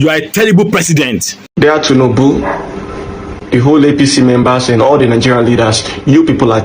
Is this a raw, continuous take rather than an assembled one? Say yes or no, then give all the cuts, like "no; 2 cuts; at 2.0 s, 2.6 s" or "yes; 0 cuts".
no; 1 cut; at 1.5 s